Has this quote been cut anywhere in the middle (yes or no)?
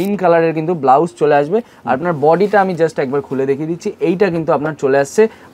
no